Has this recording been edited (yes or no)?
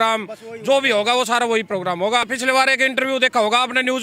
yes